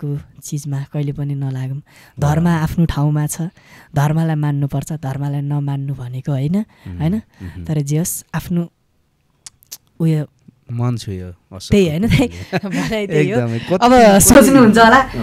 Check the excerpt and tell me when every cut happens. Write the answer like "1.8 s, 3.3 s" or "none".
none